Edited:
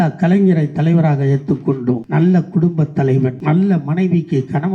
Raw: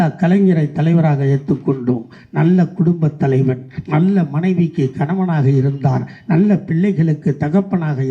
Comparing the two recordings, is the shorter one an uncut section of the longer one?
no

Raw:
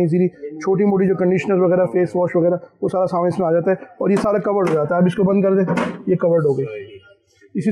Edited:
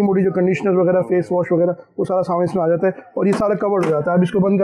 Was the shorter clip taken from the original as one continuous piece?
yes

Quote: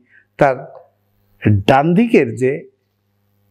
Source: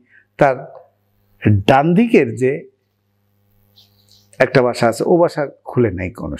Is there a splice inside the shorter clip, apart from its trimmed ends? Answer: no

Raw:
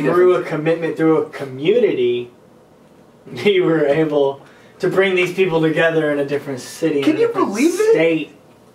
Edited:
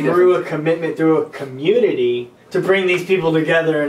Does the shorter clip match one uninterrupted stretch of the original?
no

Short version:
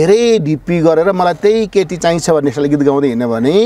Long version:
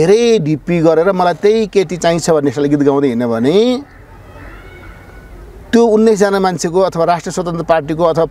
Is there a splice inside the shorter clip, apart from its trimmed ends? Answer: no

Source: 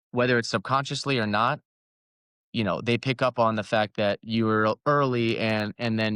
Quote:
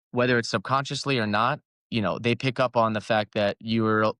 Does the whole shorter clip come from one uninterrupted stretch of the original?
no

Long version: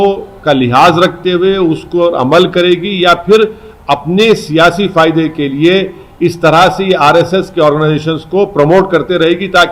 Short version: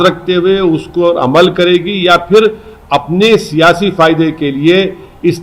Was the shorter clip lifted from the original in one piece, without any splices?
yes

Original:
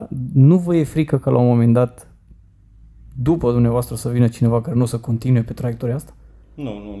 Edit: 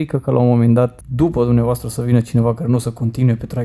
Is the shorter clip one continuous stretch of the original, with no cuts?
no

